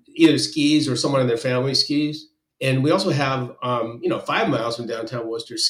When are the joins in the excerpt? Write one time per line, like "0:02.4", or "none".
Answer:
none